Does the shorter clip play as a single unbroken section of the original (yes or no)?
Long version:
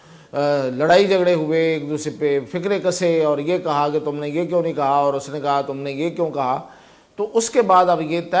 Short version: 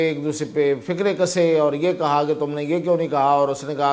yes